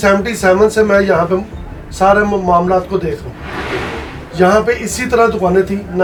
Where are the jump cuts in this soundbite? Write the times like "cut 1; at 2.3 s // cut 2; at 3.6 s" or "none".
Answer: none